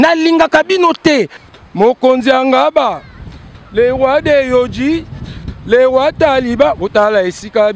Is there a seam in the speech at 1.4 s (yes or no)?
yes